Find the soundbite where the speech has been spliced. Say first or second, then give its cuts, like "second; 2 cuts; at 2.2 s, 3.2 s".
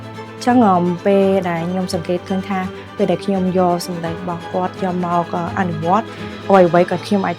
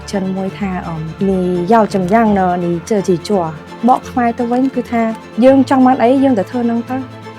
second; 2 cuts; at 1.0 s, 5.2 s